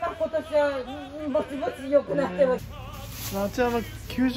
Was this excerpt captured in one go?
no; 1 cut; at 2.7 s

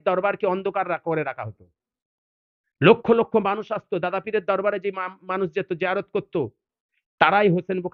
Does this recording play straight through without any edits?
yes; 0 cuts

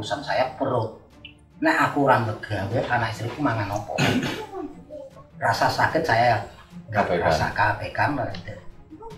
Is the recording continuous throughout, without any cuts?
yes; 0 cuts

